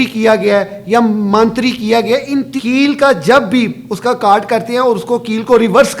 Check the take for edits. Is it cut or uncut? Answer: cut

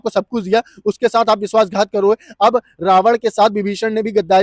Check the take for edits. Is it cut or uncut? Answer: uncut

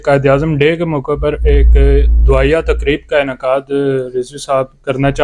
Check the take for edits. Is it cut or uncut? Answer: uncut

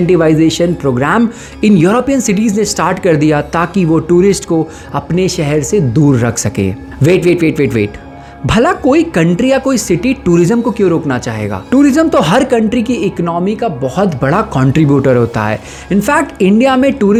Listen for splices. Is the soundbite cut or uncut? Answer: uncut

